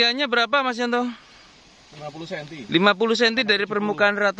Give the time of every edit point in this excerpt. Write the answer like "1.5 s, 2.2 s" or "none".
none